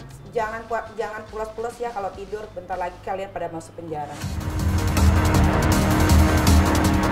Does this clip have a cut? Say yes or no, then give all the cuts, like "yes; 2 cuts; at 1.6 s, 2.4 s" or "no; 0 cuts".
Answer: no; 0 cuts